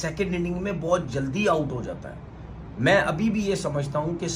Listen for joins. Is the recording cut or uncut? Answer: uncut